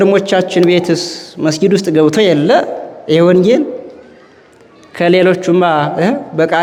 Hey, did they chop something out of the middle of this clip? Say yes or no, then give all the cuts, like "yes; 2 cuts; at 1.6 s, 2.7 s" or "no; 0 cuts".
no; 0 cuts